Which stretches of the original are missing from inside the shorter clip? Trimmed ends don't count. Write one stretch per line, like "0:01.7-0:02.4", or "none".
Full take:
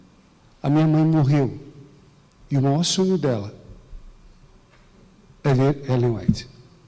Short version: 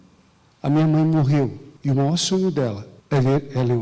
0:01.7-0:02.3
0:03.6-0:05.2